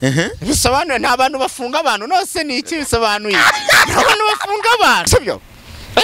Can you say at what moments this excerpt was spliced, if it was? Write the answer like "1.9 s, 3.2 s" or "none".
5.1 s